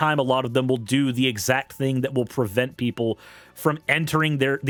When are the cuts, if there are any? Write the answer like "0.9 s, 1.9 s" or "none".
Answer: none